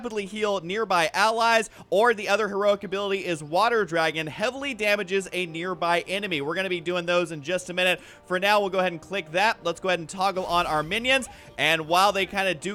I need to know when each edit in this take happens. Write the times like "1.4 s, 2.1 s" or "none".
1.8 s